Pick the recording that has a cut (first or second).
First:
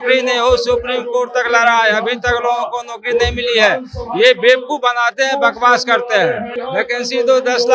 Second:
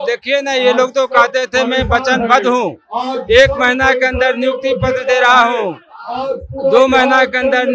first